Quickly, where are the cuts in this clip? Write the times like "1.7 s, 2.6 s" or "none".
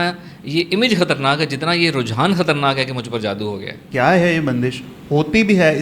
3.8 s